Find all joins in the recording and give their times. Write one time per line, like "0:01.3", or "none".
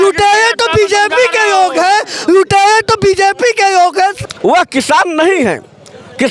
0:04.3